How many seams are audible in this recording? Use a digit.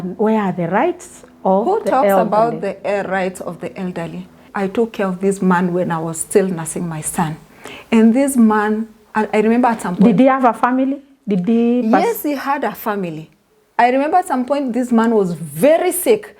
1